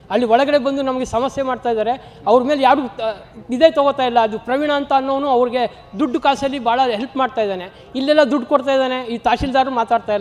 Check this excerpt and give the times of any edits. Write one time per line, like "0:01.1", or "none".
none